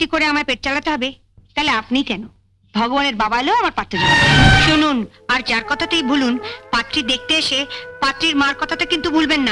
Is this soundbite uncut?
no; 1 cut; at 4.6 s

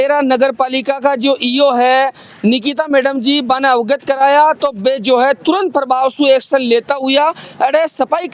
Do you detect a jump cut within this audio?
no; 0 cuts

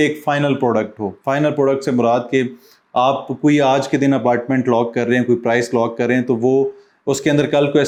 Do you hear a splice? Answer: no; 0 cuts

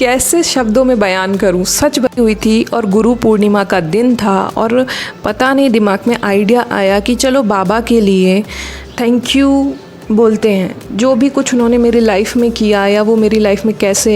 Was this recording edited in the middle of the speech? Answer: yes; 1 cut; at 2.1 s

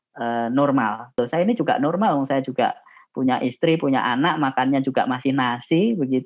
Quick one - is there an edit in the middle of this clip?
yes; 1 cut; at 1.2 s

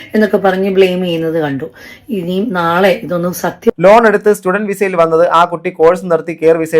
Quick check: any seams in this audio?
yes; 1 cut; at 3.7 s

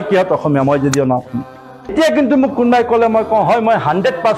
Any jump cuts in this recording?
yes; 1 cut; at 1.9 s

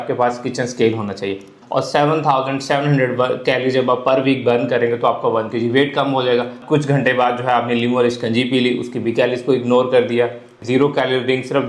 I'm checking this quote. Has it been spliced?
yes; 3 cuts; at 1.6 s, 6.6 s, 10.6 s

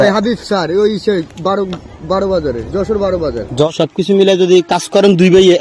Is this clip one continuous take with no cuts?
no; 1 cut; at 3.7 s

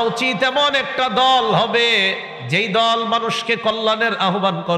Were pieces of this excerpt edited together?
no; 0 cuts

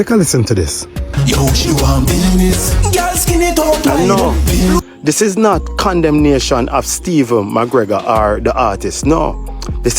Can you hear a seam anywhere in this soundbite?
yes; 1 cut; at 4.8 s

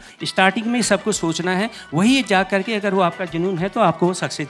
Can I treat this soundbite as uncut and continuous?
yes; 0 cuts

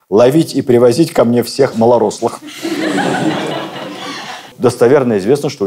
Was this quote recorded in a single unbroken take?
no; 1 cut; at 4.5 s

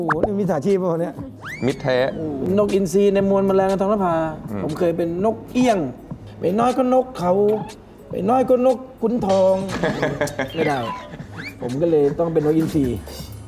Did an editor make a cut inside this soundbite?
yes; 1 cut; at 2.4 s

